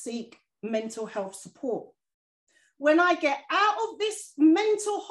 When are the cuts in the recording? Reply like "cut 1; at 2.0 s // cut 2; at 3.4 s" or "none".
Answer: cut 1; at 2.0 s